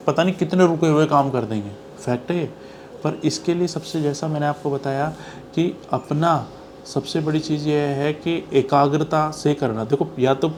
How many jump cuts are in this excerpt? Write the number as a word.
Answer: zero